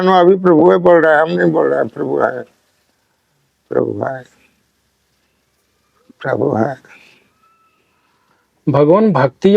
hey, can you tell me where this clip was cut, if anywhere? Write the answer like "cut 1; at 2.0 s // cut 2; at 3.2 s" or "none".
none